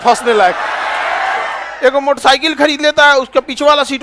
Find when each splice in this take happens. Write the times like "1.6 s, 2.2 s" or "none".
1.6 s